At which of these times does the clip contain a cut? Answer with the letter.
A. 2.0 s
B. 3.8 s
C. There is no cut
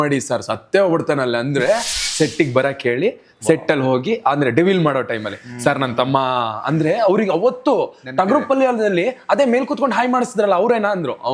A